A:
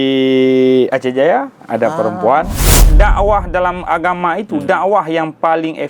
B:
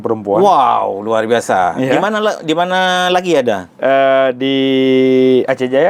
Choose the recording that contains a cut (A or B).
A